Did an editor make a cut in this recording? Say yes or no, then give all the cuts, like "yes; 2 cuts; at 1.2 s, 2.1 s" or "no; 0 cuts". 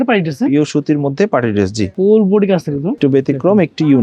yes; 2 cuts; at 1.9 s, 3.0 s